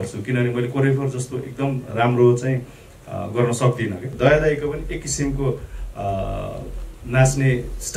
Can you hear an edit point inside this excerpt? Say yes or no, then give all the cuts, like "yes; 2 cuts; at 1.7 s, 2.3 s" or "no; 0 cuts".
yes; 1 cut; at 4.1 s